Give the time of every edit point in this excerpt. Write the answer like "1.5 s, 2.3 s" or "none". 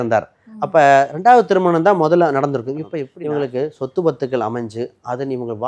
3.1 s

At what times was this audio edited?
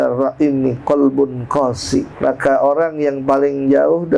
2.1 s

